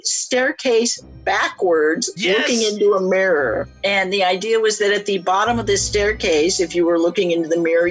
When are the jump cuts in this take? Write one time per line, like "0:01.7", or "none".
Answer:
none

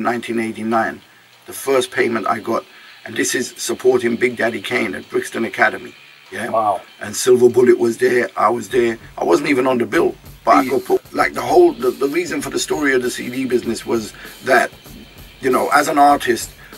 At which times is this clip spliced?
0:11.0

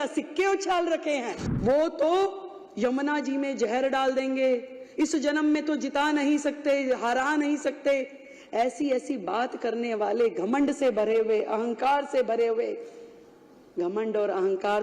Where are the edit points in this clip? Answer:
0:01.4

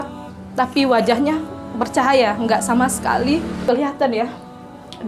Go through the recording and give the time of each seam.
0:03.6

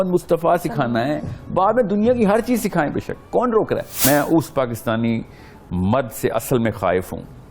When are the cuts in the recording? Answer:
0:04.0

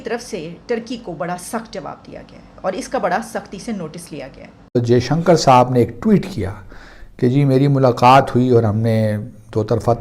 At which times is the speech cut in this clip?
0:04.7

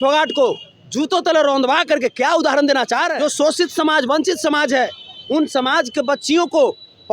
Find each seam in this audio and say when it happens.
0:03.1

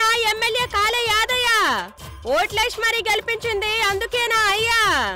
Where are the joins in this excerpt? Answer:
none

